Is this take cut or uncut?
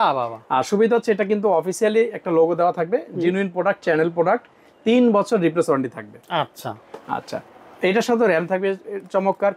uncut